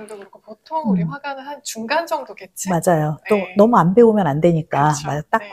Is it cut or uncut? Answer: uncut